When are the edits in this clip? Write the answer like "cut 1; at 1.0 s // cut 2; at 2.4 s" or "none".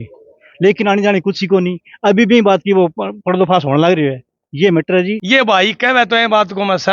cut 1; at 5.2 s